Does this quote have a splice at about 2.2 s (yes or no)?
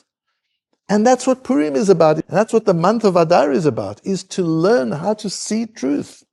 yes